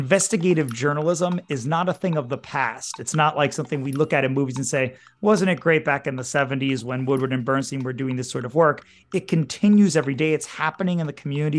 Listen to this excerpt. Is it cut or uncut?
uncut